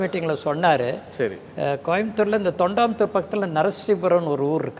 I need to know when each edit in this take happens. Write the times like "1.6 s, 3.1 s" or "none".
none